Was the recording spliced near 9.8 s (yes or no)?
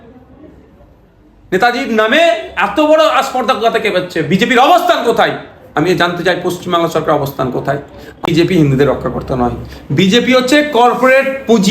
no